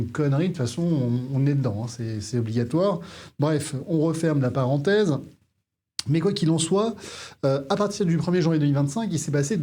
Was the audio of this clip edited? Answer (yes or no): no